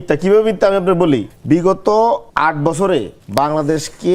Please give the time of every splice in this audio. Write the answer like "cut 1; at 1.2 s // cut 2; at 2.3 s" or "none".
cut 1; at 1.3 s // cut 2; at 2.3 s // cut 3; at 3.2 s